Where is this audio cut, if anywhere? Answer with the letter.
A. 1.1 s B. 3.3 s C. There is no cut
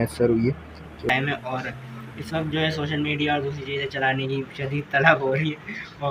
A